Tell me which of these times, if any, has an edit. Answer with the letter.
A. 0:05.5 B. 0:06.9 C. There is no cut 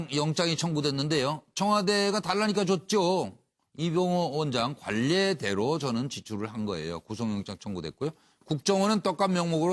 B